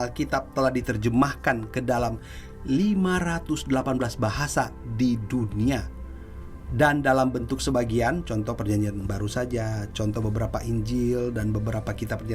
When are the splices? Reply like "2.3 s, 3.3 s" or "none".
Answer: none